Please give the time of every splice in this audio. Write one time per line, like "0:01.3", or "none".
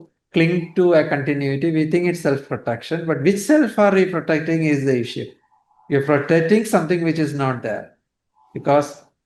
none

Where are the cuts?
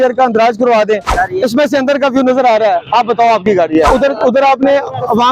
0:01.1
0:03.9

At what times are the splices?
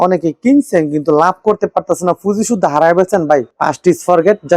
none

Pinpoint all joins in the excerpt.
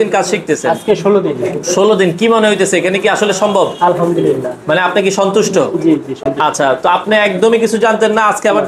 none

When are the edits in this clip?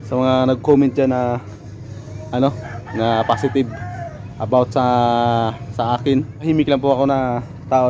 0:06.4

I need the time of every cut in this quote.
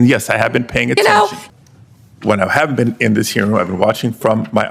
0:01.4

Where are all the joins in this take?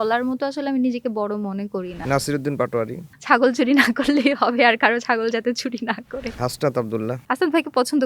0:02.0
0:03.1
0:06.3
0:07.2

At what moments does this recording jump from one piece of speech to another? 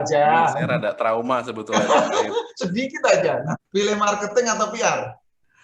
0:03.6

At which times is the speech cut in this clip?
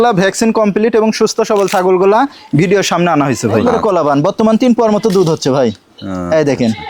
0:03.6

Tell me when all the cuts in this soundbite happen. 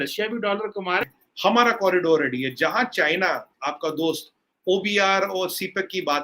0:01.2

